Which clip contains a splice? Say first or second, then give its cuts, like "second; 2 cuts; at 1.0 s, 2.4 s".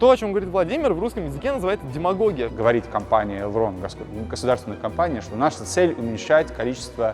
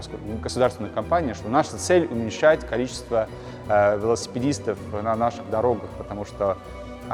first; 1 cut; at 2.5 s